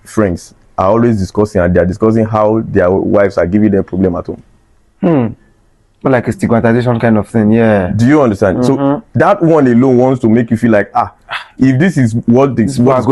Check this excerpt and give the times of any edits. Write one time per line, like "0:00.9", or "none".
none